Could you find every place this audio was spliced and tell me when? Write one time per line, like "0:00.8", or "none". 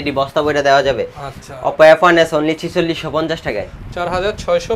none